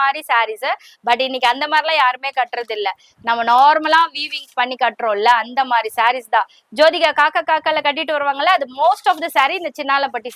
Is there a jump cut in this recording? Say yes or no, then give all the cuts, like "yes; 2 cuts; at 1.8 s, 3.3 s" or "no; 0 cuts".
no; 0 cuts